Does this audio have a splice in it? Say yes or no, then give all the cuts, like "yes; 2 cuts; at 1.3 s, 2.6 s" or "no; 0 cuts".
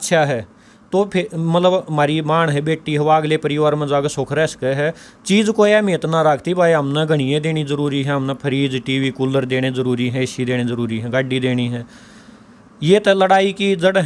no; 0 cuts